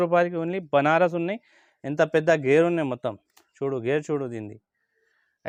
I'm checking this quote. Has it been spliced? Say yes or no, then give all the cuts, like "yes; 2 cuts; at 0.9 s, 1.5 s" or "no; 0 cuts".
no; 0 cuts